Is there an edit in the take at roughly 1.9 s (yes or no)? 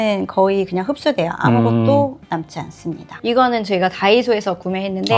no